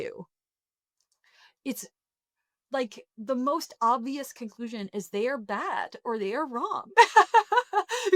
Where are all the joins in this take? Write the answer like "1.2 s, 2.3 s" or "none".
none